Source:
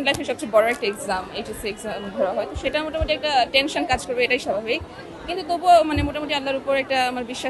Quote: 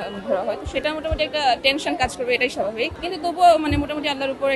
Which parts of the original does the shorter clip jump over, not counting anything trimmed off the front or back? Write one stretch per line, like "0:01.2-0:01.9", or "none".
0:04.9-0:05.2